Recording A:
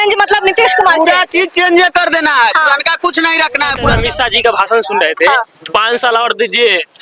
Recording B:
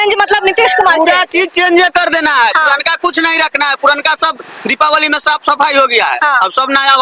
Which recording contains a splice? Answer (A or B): A